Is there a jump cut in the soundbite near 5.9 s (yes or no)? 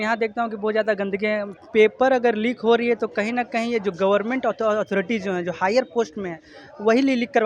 no